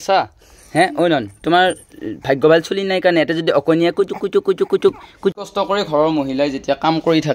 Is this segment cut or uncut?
cut